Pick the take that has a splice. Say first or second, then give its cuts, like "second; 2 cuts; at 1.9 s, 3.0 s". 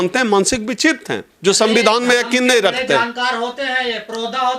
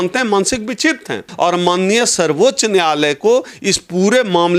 second; 1 cut; at 1.3 s